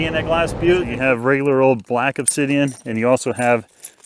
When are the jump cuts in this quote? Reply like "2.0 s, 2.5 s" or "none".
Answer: 0.9 s